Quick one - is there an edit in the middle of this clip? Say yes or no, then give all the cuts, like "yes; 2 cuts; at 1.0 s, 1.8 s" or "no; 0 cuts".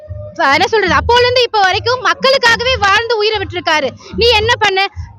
no; 0 cuts